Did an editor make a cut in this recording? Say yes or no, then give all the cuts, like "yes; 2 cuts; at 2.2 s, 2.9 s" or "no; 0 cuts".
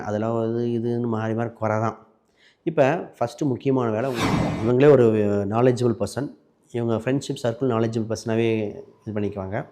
yes; 1 cut; at 4.3 s